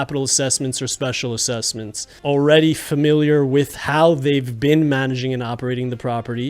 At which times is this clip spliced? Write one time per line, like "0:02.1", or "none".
0:02.1